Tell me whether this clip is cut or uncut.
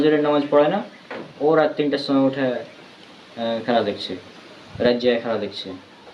uncut